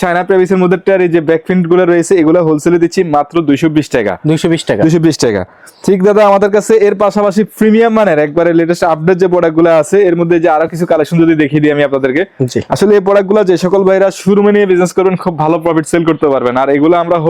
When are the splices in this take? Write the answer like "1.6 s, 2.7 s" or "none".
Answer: none